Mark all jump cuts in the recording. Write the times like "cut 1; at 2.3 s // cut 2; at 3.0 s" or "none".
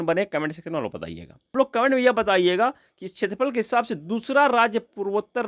cut 1; at 1.5 s